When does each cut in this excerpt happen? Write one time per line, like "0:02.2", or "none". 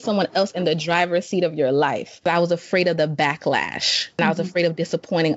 0:02.3
0:04.2